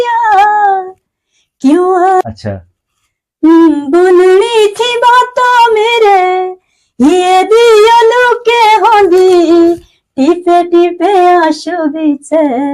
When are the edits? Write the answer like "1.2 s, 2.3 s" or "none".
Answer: 2.2 s